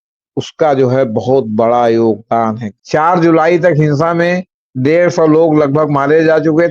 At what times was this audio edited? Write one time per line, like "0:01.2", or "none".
0:02.7